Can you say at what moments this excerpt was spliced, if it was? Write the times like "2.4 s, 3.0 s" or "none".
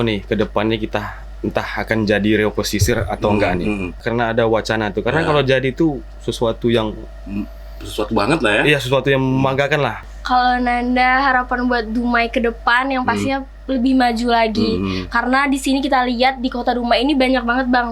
4.0 s, 10.0 s